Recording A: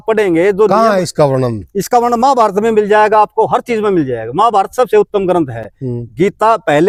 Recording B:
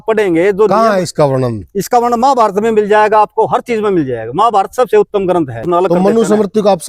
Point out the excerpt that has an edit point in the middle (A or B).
B